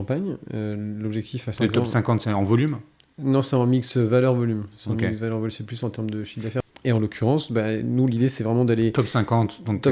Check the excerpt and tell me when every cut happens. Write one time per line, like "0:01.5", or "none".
0:06.6